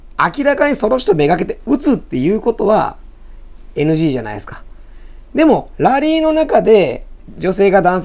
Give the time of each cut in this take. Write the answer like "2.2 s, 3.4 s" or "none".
none